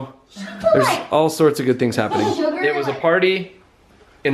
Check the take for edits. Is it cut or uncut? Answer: cut